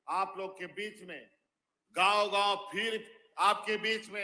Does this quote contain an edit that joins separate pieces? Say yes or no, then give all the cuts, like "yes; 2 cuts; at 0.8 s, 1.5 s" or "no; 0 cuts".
no; 0 cuts